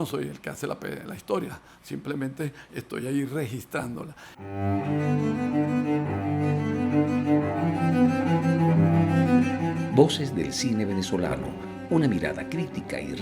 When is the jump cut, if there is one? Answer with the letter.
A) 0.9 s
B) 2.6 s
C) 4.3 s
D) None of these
C